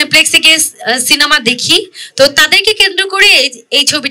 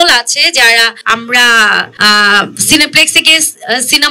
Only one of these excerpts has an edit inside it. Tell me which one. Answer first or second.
second